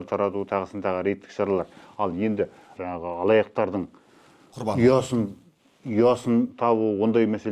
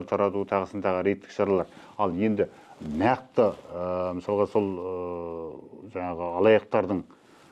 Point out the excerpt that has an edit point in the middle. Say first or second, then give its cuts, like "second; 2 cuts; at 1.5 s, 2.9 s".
first; 1 cut; at 2.7 s